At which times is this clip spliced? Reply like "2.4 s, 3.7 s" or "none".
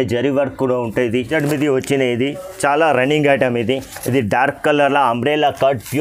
1.3 s